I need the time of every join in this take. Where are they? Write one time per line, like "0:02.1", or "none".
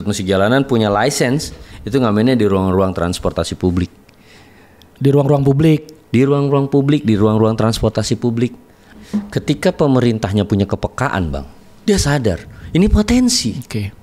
0:08.8